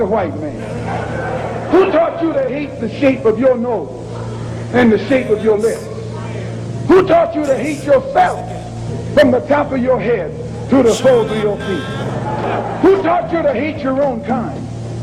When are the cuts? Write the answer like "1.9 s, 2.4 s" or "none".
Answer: none